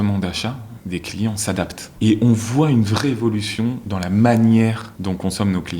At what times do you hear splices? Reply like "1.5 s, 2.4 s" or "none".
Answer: 1.8 s, 4.9 s